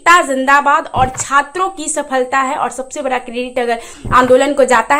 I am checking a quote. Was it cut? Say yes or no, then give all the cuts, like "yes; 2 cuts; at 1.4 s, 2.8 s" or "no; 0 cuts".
no; 0 cuts